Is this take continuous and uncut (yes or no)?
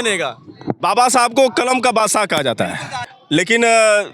no